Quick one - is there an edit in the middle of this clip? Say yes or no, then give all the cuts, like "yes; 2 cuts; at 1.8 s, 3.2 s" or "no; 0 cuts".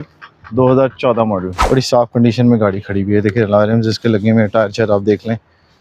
yes; 1 cut; at 1.5 s